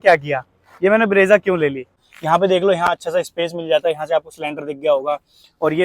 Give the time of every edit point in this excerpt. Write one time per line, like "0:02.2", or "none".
0:02.1